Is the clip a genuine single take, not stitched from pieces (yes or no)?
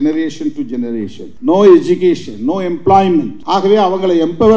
no